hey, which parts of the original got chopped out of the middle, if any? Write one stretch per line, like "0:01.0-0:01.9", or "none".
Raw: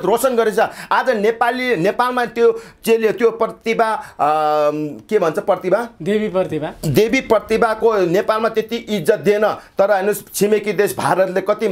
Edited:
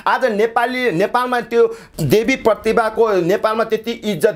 0:02.7-0:06.7